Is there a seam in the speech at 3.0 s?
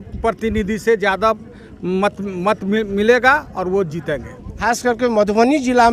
no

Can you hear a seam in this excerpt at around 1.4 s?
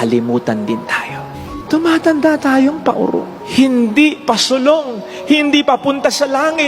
yes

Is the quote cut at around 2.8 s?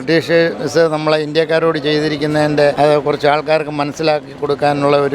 yes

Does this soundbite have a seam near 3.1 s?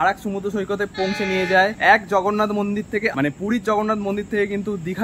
yes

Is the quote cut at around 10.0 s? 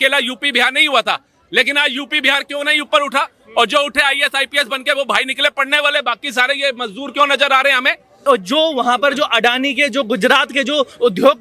no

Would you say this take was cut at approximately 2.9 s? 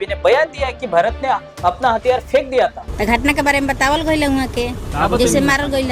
yes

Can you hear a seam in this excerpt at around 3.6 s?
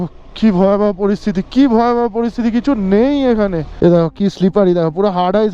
yes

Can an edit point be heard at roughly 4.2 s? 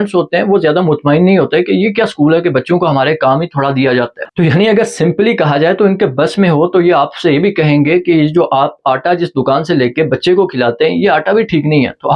yes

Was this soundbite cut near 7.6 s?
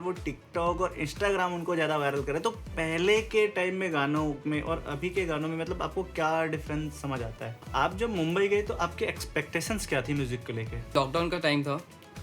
yes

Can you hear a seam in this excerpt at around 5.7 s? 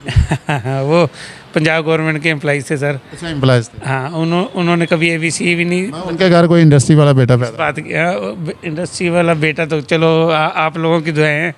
no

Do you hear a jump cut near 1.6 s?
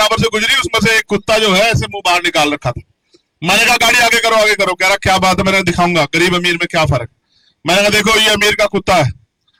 no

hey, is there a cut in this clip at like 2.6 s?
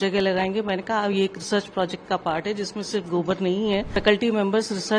no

